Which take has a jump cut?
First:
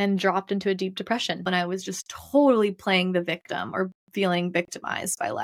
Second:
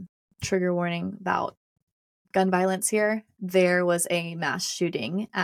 first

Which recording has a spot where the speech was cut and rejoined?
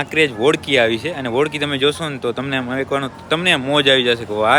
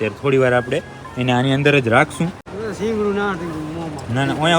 second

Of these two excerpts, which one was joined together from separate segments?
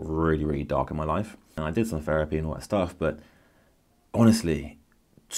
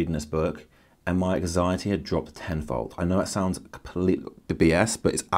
first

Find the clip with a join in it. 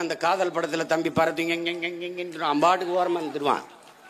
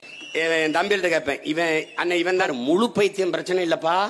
second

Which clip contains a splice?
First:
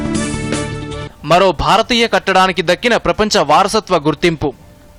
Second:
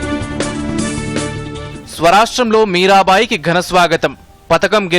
second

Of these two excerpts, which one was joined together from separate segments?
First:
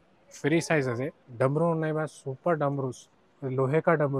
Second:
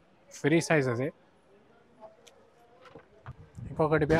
first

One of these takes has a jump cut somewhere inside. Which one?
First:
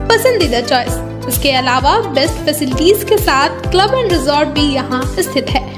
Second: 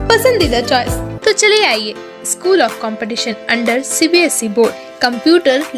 second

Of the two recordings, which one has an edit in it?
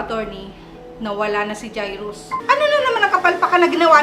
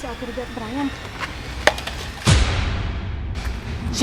first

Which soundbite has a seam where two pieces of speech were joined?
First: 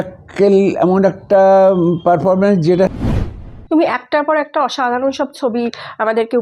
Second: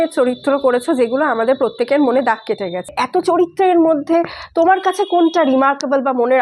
first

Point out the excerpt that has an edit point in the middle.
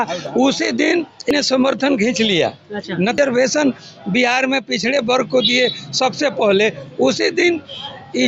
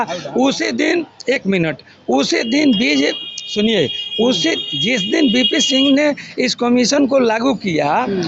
first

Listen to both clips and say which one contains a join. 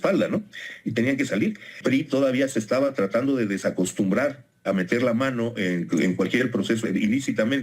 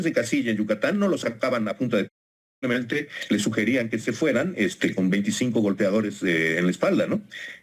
first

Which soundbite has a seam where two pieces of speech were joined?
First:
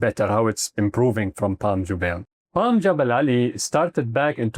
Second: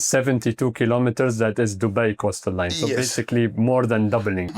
first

